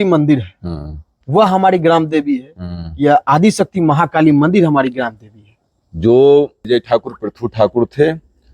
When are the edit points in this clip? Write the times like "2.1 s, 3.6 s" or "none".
6.6 s